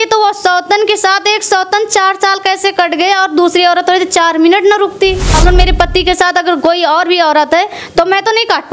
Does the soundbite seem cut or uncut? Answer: cut